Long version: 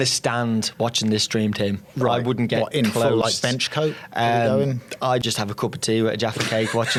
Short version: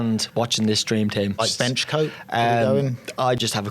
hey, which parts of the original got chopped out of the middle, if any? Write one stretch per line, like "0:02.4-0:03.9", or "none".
0:01.8-0:03.2